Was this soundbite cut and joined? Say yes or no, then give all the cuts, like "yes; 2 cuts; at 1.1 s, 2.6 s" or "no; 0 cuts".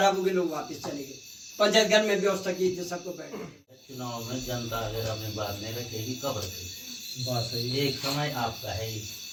no; 0 cuts